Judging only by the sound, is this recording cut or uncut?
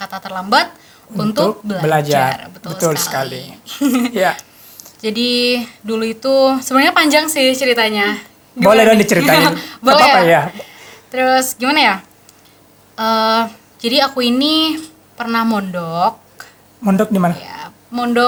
uncut